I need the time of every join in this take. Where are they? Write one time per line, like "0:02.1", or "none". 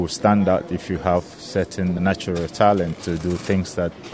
0:02.0
0:03.0